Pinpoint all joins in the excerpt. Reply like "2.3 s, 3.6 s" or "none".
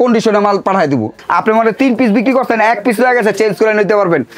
1.2 s

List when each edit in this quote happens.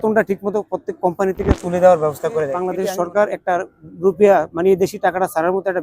2.7 s

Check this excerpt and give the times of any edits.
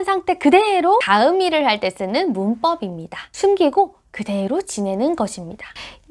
1.1 s

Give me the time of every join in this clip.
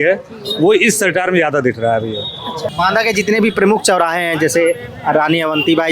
2.6 s

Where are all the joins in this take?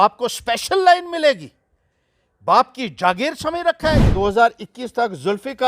4.1 s

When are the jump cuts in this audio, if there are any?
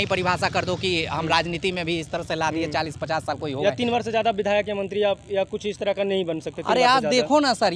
none

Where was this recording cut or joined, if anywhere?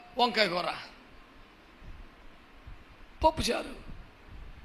none

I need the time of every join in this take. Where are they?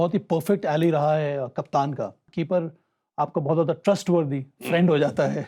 2.2 s

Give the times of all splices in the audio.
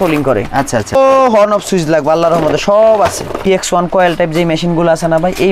0.9 s, 3.5 s

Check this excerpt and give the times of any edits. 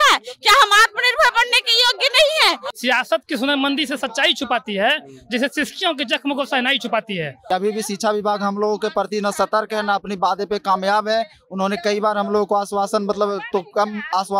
2.7 s, 7.3 s

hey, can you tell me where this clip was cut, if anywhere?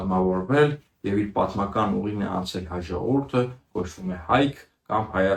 none

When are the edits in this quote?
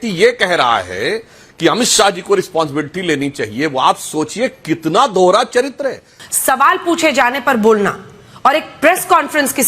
6.2 s

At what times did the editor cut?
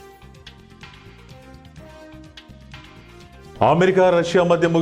2.9 s

